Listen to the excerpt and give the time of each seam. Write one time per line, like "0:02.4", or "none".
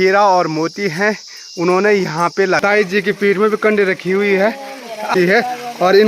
0:02.6
0:05.1